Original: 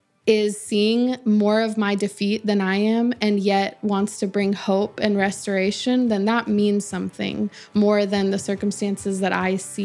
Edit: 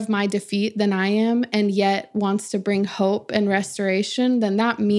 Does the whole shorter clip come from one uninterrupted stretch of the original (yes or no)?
yes